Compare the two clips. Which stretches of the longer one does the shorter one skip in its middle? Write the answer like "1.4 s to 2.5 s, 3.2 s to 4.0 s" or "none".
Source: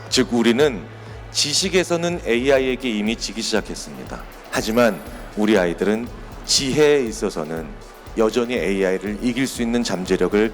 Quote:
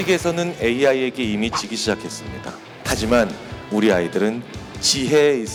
none